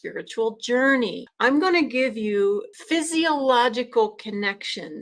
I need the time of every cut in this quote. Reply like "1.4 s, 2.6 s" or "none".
1.2 s, 2.7 s

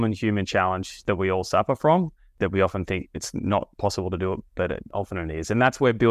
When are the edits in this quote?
1.0 s, 4.9 s

